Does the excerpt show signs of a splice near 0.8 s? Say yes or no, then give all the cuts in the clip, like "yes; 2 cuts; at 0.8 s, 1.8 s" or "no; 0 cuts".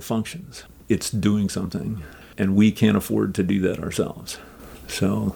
yes; 2 cuts; at 0.8 s, 2.3 s